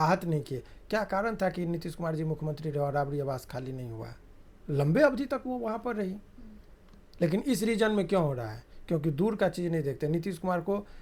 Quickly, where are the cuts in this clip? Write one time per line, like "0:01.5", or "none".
none